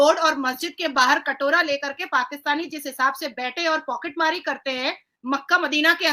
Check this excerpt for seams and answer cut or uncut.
uncut